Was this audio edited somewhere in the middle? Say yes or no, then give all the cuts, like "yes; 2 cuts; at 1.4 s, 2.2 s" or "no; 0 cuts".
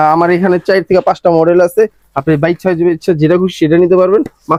no; 0 cuts